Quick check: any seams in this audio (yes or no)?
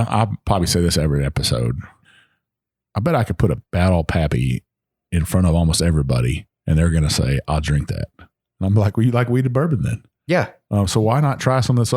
yes